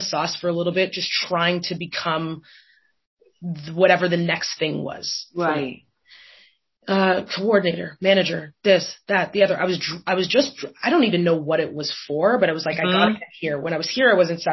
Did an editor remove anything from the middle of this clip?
no; 0 cuts

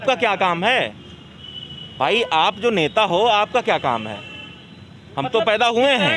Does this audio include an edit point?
no; 0 cuts

